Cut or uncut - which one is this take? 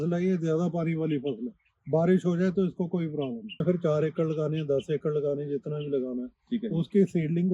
cut